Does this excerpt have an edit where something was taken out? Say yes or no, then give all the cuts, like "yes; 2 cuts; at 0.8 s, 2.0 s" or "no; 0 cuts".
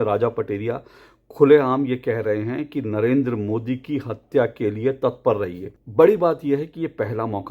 yes; 1 cut; at 5.8 s